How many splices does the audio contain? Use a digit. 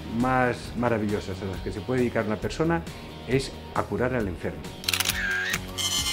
0